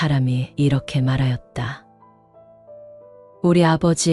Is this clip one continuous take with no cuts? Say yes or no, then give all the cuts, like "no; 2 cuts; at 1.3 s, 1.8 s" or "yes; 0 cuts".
yes; 0 cuts